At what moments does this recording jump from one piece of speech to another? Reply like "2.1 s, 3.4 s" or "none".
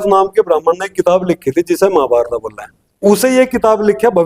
3.0 s